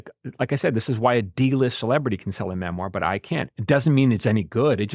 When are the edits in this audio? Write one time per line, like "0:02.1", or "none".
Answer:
none